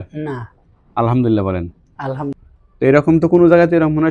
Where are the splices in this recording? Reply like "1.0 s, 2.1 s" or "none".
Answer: 2.9 s